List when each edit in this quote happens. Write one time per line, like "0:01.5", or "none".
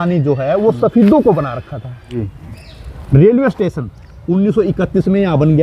0:02.2